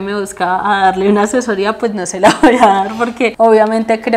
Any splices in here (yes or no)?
no